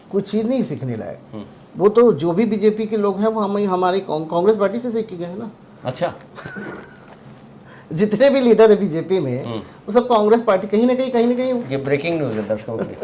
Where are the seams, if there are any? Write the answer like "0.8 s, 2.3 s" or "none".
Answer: none